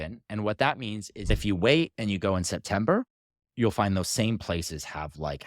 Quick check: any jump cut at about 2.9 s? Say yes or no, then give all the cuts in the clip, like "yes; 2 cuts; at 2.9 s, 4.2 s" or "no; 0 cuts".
no; 1 cut; at 1.3 s